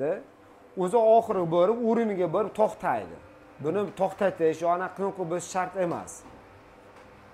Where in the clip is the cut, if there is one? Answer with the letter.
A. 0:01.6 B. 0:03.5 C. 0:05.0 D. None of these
D